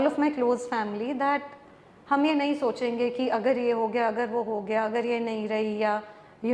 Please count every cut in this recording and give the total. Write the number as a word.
zero